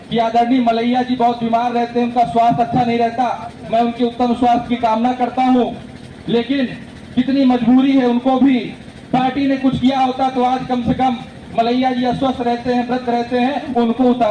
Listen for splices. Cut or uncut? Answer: uncut